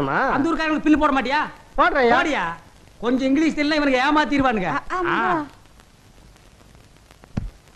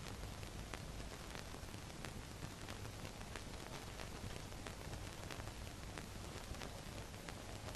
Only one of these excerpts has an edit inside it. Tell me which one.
first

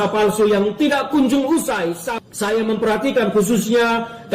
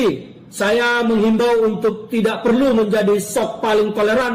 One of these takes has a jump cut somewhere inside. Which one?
first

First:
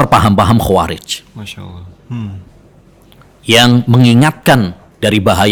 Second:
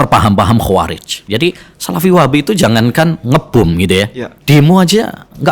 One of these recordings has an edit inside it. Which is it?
second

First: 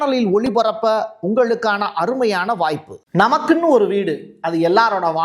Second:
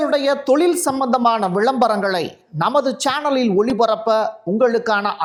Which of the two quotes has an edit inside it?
first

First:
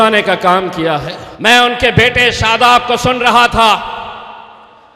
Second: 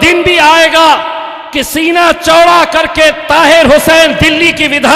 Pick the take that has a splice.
first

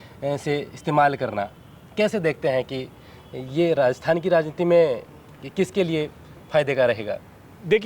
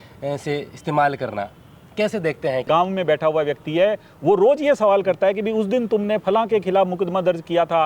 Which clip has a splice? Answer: second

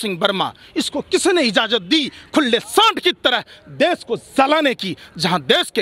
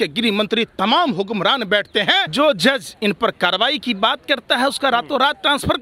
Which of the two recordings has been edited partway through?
second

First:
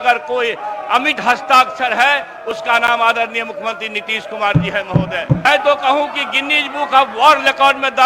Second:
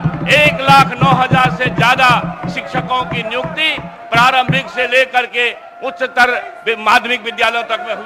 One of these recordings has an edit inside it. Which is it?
first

